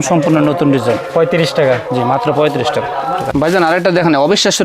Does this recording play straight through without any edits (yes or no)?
yes